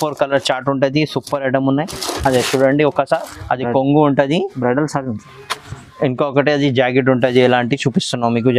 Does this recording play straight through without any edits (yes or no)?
yes